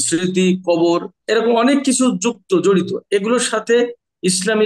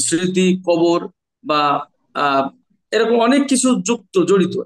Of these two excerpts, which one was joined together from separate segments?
first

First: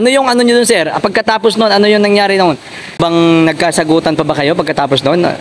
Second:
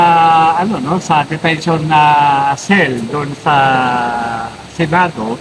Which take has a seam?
first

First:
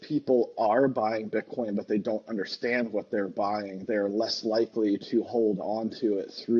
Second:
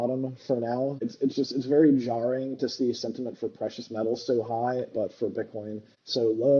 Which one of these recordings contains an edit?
second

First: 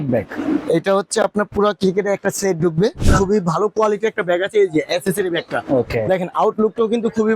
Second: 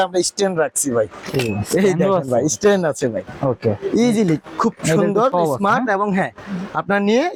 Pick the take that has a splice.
first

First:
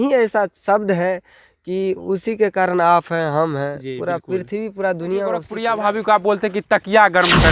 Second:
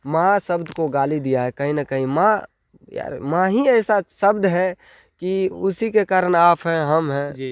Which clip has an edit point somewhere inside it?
first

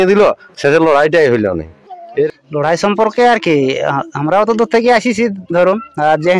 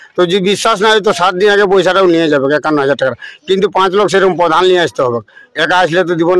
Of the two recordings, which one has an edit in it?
first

